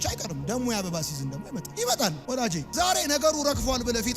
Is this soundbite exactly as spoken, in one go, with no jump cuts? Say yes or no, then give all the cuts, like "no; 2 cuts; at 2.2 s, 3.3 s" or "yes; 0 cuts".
no; 1 cut; at 2.2 s